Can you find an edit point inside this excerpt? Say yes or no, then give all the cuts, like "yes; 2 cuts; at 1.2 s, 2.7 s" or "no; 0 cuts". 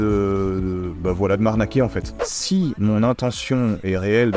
yes; 1 cut; at 2.3 s